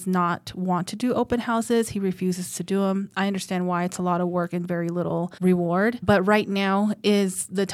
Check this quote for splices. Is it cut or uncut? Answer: cut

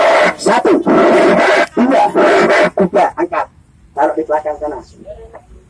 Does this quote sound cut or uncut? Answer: uncut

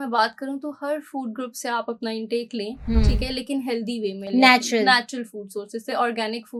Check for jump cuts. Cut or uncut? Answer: uncut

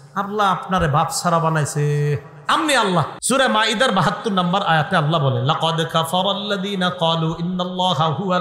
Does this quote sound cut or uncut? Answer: cut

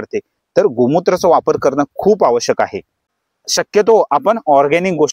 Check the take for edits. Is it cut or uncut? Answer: cut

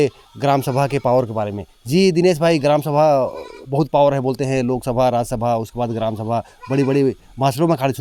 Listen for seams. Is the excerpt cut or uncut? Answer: uncut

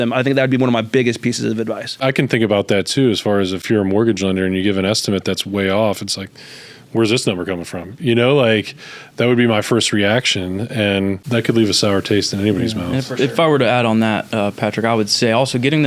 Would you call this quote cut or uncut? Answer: cut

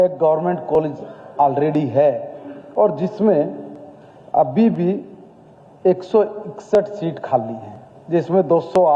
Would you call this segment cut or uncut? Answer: uncut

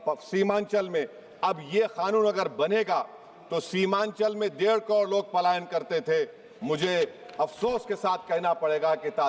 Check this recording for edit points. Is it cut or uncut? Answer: uncut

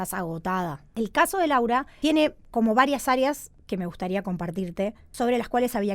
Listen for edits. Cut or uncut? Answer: cut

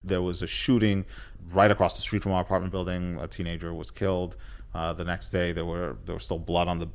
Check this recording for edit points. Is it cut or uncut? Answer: cut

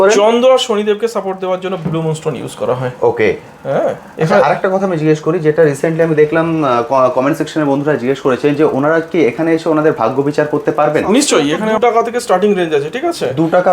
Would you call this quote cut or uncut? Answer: cut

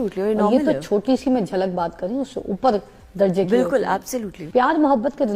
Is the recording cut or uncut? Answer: cut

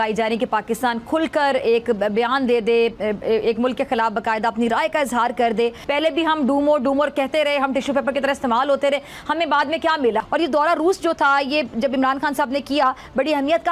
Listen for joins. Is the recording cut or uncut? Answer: cut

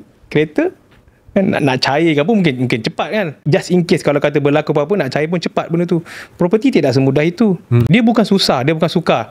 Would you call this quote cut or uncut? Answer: cut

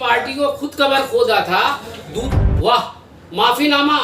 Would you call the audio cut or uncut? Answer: cut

